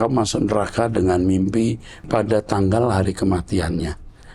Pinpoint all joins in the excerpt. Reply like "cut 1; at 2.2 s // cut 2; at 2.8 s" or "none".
cut 1; at 2.1 s